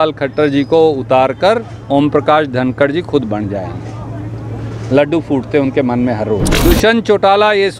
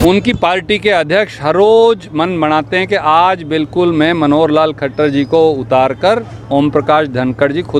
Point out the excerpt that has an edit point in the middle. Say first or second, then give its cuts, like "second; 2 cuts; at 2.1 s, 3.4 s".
first; 1 cut; at 6.5 s